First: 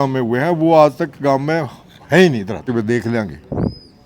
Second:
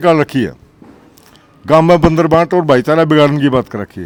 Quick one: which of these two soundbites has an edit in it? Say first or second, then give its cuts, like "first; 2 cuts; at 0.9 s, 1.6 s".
first; 1 cut; at 2.7 s